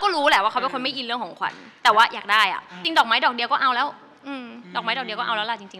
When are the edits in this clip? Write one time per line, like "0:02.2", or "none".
0:02.7